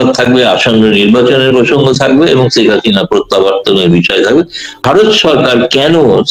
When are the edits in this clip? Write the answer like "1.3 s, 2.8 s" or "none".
4.8 s